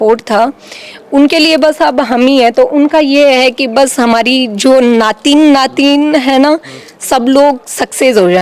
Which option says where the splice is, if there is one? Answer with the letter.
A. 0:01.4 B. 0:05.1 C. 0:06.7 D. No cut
D